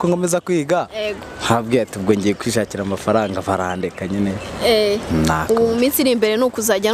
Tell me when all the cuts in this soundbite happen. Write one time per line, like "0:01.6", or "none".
none